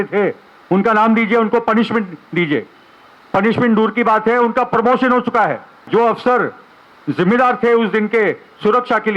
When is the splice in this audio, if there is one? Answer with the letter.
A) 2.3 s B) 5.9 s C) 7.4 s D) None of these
B